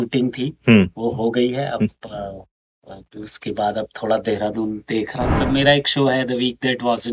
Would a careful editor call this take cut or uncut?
cut